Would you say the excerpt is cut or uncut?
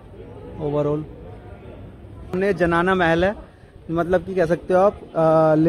cut